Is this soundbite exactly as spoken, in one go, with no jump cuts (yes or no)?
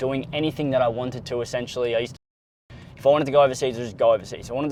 yes